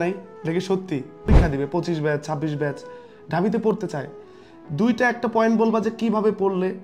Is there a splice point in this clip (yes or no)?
yes